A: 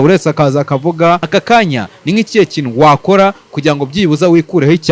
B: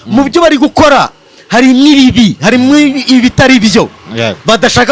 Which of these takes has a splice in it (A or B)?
A